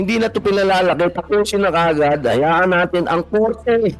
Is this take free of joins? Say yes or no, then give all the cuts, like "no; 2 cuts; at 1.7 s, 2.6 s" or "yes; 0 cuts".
yes; 0 cuts